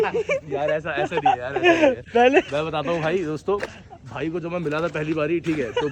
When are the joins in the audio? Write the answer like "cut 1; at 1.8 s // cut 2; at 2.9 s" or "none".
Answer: none